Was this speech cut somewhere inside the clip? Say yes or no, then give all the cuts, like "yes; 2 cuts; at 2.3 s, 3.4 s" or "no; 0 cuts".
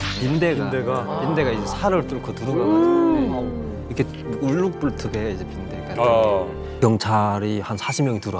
yes; 1 cut; at 6.7 s